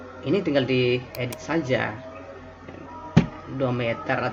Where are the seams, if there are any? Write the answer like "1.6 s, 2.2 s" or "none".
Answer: none

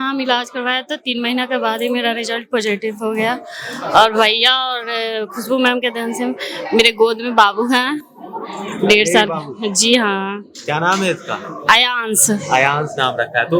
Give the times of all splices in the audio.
none

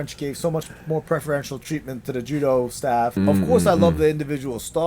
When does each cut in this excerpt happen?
3.2 s

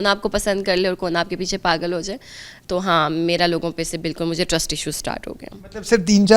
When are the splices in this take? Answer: none

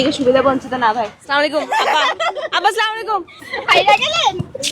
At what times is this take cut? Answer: 3.5 s

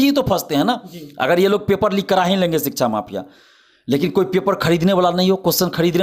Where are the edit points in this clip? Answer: none

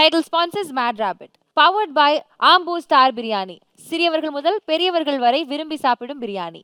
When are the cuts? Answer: none

